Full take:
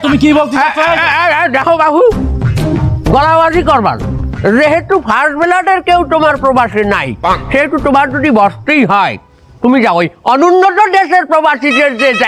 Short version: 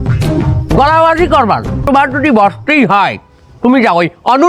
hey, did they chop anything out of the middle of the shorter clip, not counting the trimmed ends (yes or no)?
yes